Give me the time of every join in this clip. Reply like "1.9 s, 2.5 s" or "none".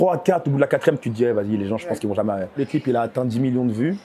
2.6 s